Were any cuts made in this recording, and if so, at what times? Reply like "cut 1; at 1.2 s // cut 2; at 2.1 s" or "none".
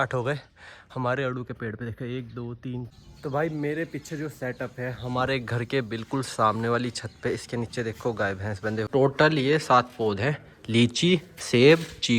cut 1; at 2.9 s // cut 2; at 8.9 s